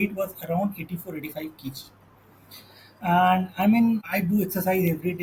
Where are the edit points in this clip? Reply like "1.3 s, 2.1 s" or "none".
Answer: none